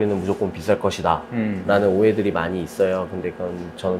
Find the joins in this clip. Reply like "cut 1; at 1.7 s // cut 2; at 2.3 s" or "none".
none